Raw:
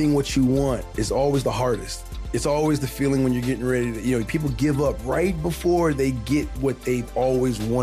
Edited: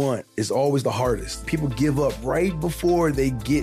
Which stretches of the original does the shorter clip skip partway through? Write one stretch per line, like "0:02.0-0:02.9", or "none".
0:02.1-0:04.3

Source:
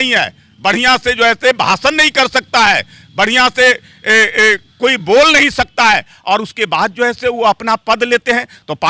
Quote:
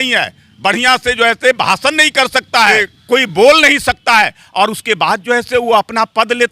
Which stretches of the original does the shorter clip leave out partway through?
0:02.9-0:04.6

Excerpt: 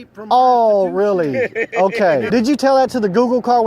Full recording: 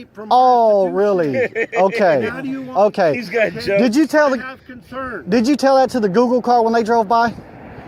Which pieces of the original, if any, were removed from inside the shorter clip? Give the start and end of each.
0:02.3-0:05.3

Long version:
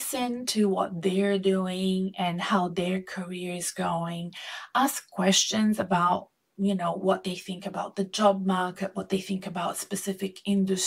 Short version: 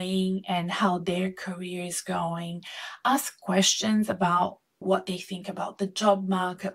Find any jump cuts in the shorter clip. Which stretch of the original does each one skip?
0:06.5-0:07.0

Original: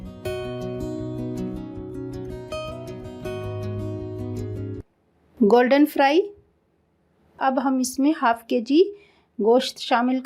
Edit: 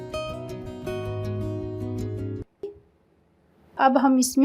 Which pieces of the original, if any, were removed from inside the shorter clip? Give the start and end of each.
0:05.2-0:06.4

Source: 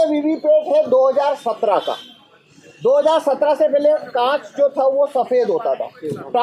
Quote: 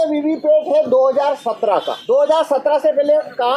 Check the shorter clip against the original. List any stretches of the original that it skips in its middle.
0:01.9-0:02.7

